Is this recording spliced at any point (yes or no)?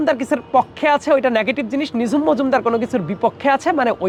no